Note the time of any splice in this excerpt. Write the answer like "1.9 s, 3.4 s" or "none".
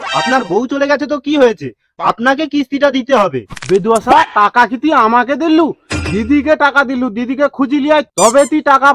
none